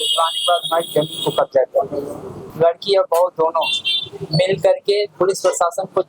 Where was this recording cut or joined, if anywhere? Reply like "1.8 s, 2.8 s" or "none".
2.4 s